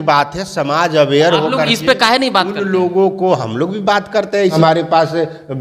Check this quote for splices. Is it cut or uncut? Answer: cut